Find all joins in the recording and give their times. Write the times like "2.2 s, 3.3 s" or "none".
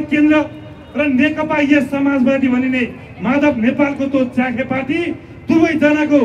none